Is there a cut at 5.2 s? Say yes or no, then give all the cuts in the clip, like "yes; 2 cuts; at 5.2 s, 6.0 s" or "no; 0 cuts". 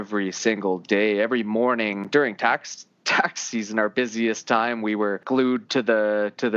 yes; 2 cuts; at 2.0 s, 5.2 s